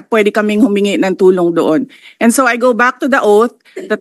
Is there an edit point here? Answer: no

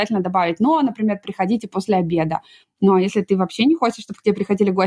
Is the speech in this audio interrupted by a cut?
no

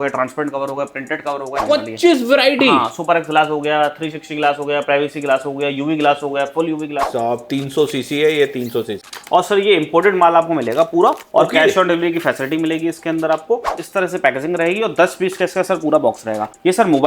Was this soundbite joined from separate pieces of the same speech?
yes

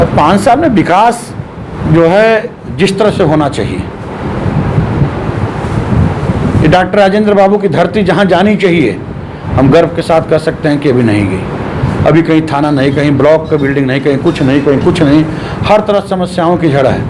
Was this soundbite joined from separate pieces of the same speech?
no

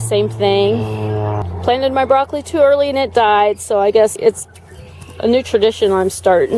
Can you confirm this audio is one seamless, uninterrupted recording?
no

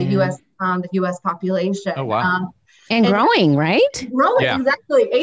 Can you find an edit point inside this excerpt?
no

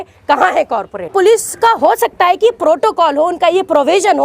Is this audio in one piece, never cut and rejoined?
no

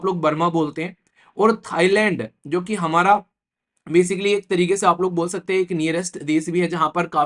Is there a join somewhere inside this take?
no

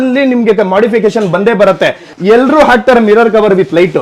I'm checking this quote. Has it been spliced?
yes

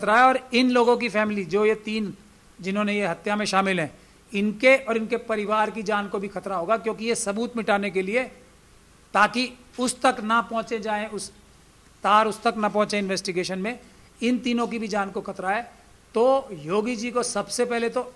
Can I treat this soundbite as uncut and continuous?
yes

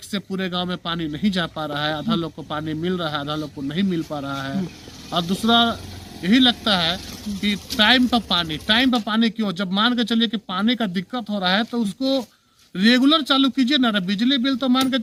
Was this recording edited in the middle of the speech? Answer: no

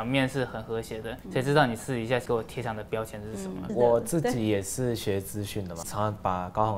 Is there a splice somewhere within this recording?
yes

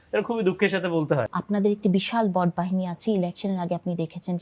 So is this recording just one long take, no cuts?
no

